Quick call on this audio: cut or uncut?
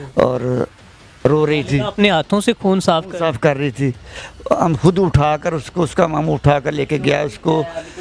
uncut